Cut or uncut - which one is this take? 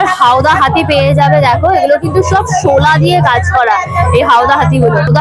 uncut